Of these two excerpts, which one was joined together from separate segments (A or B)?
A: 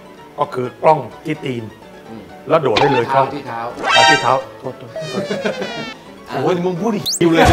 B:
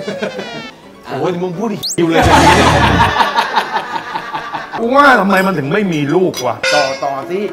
B